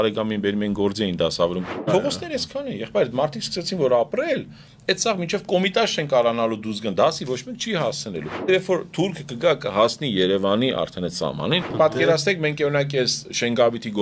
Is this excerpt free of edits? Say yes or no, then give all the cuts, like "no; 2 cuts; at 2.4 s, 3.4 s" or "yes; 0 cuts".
no; 3 cuts; at 1.8 s, 8.5 s, 11.7 s